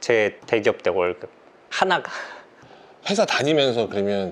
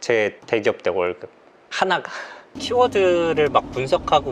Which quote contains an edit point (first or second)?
second